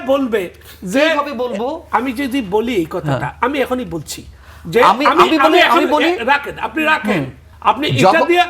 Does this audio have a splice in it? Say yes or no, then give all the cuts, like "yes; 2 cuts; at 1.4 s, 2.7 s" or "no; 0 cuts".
yes; 1 cut; at 7.4 s